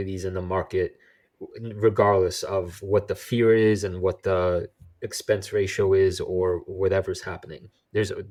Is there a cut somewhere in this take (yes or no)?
no